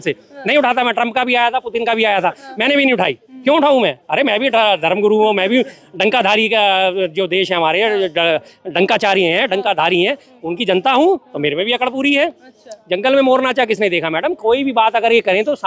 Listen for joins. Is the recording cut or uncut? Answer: uncut